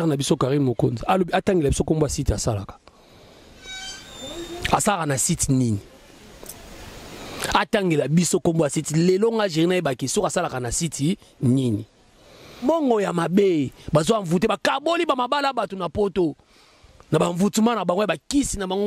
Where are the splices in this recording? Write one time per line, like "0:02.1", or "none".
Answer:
0:12.4